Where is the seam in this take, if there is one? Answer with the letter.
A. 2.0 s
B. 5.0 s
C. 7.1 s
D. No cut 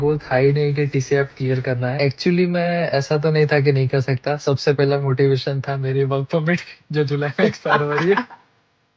A